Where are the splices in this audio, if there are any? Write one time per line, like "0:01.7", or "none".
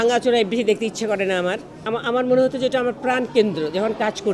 0:01.8